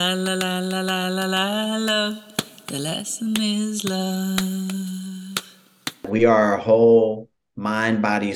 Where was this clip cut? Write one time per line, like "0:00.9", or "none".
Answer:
0:06.0